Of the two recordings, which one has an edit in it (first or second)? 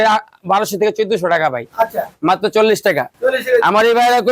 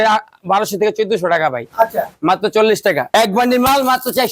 second